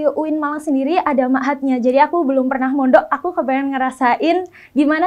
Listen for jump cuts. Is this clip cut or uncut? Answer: uncut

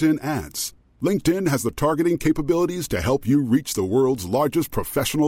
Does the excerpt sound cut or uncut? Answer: uncut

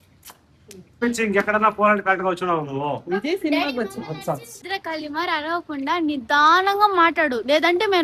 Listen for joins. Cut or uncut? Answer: cut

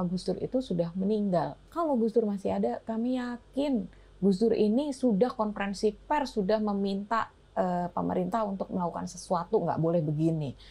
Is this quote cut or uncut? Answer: cut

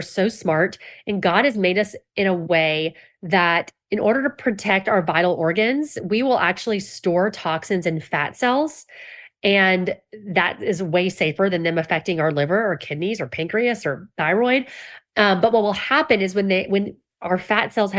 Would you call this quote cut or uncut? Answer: uncut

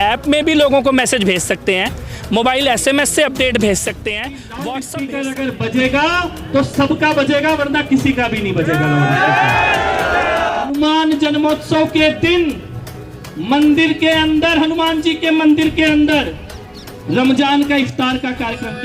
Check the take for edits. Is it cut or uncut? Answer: cut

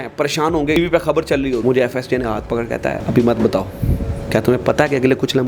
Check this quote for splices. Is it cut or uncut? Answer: cut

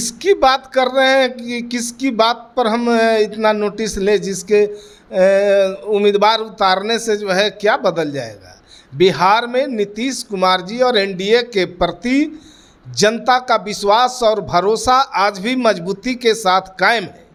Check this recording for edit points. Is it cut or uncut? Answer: uncut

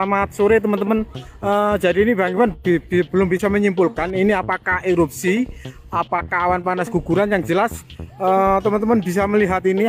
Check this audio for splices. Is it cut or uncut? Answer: uncut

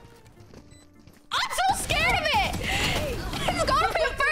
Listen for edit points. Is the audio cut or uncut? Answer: uncut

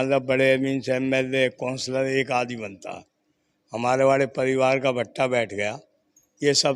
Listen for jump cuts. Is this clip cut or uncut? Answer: uncut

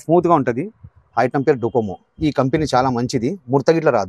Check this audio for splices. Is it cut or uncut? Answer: uncut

